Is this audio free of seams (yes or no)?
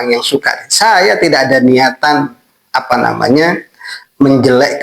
yes